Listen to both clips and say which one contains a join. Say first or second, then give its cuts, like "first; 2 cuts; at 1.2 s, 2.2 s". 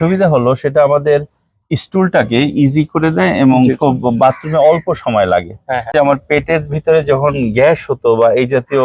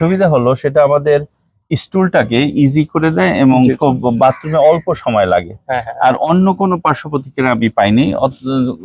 first; 1 cut; at 5.9 s